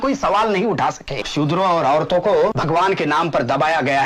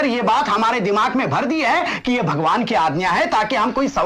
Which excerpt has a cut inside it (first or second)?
first